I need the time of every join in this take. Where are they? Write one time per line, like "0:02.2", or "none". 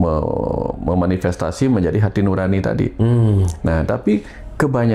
none